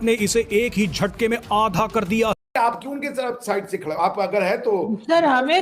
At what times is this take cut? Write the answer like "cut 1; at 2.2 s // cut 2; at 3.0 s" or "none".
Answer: cut 1; at 2.4 s